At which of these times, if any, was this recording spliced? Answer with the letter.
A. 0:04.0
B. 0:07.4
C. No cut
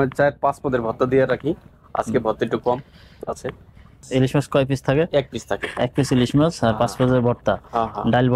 A